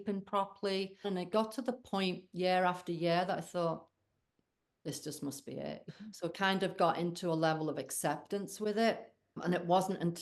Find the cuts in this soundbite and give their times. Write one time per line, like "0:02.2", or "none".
0:01.1
0:05.8
0:09.4